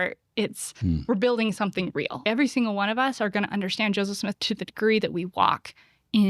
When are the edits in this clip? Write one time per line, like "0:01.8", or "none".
0:02.2
0:04.4